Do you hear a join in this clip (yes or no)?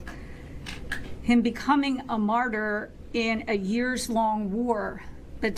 no